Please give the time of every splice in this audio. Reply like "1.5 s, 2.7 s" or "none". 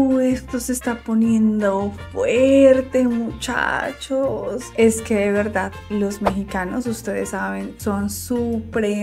none